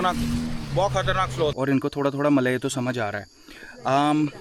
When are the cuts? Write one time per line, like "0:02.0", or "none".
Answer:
0:01.5